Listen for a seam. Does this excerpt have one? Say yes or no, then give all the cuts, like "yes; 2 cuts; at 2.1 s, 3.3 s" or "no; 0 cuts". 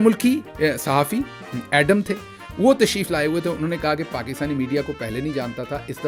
no; 0 cuts